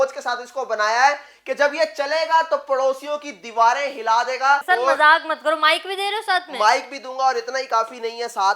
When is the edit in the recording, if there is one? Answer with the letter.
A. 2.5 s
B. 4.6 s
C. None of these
B